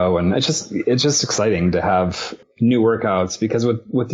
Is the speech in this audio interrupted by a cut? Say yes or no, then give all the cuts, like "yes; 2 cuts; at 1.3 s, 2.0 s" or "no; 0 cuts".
yes; 1 cut; at 2.3 s